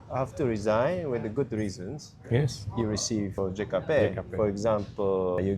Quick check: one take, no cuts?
no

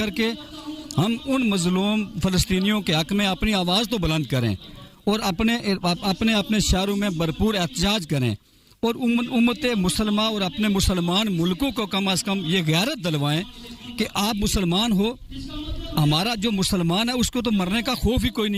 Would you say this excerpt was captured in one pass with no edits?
yes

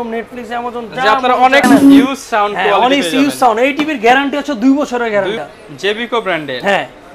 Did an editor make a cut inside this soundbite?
yes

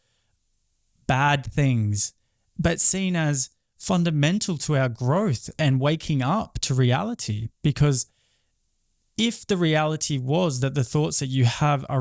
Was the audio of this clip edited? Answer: no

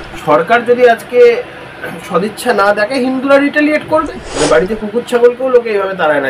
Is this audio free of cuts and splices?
no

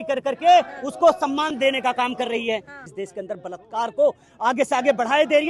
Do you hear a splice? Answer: yes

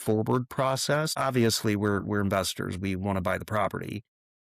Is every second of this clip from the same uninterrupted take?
no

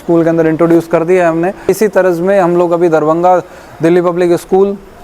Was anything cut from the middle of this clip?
yes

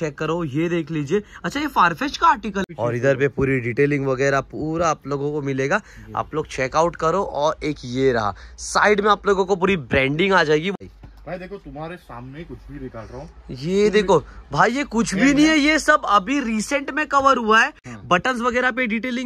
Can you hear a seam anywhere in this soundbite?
yes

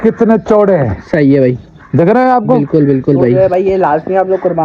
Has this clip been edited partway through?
yes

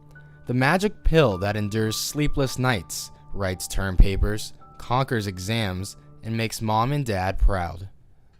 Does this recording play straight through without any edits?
no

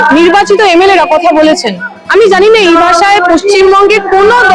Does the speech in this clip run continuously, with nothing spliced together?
yes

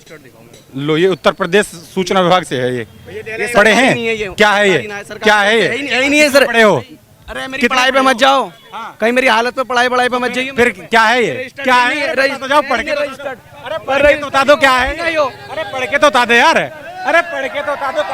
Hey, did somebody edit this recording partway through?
no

